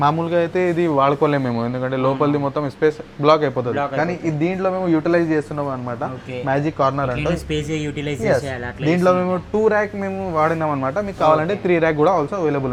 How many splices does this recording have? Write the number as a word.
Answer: zero